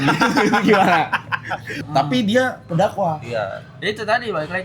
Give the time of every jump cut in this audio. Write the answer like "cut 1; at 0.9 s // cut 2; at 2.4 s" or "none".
cut 1; at 1.8 s